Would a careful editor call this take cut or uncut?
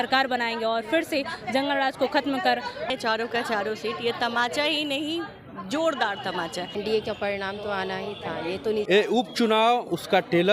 cut